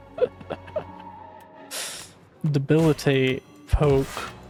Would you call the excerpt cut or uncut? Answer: uncut